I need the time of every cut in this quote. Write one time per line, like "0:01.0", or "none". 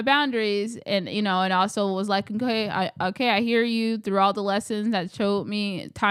none